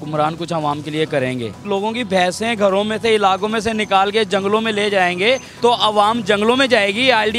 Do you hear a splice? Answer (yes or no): yes